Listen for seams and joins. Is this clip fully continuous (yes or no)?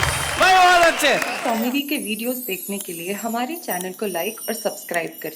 no